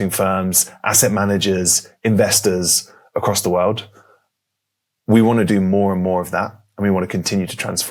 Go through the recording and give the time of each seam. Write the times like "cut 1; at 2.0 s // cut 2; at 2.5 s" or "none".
none

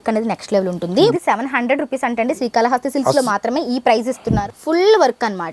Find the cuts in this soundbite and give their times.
cut 1; at 1.1 s // cut 2; at 4.4 s

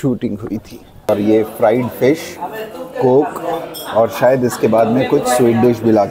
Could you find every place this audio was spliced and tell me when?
cut 1; at 1.1 s

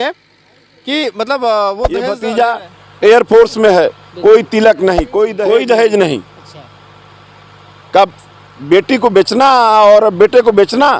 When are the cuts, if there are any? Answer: cut 1; at 2.1 s // cut 2; at 5.3 s

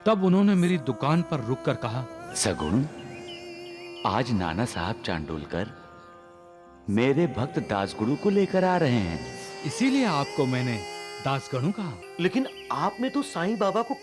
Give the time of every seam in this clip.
cut 1; at 12.0 s

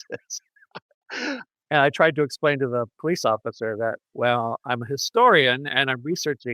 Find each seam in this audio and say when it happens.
cut 1; at 1.4 s

